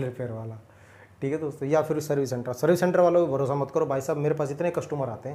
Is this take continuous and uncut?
yes; 0 cuts

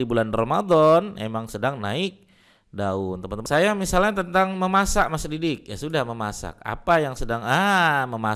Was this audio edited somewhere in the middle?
yes; 1 cut; at 3.4 s

